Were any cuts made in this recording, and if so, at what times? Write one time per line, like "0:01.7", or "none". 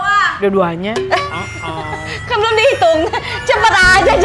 none

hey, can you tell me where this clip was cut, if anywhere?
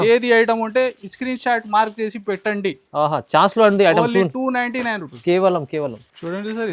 none

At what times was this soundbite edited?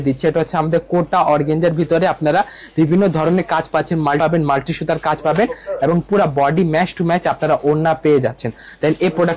0:04.2

